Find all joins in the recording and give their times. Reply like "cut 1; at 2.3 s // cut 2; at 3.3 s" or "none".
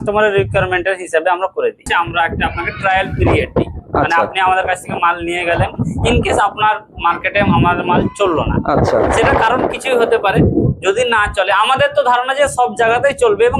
cut 1; at 1.8 s